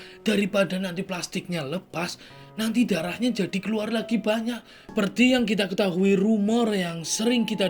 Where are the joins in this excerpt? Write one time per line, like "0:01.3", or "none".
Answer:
0:04.9